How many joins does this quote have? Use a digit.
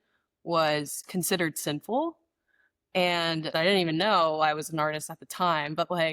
1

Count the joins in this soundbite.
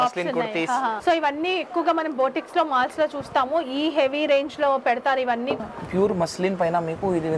2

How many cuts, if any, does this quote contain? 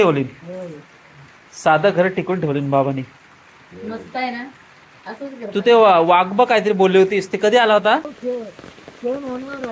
1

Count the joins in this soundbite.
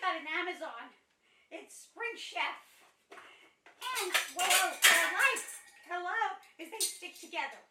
0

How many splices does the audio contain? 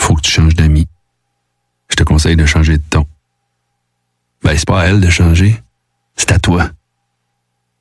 0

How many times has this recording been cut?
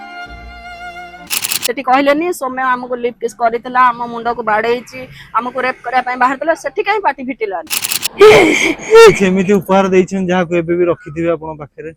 2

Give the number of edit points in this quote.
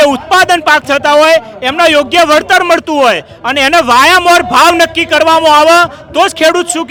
0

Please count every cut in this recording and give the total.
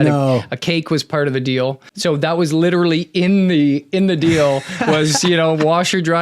1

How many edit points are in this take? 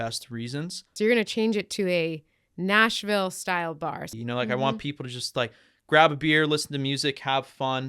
2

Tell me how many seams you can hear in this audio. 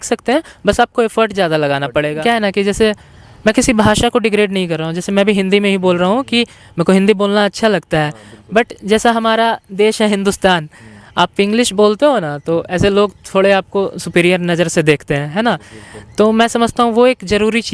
1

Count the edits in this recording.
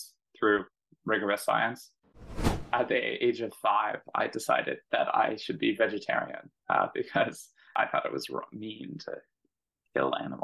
2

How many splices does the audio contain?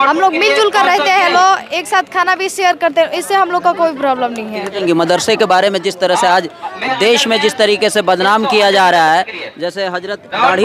1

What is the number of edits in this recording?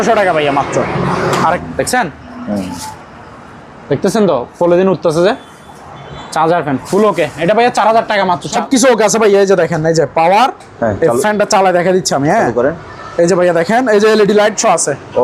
2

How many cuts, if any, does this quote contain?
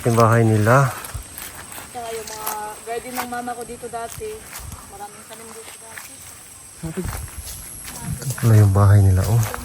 1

